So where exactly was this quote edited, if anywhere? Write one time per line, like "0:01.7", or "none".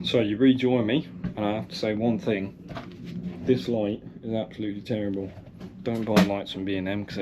none